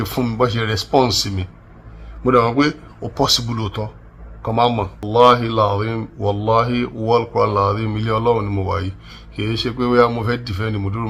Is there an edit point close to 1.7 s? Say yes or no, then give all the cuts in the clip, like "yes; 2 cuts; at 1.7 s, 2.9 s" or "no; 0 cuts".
no; 1 cut; at 5.0 s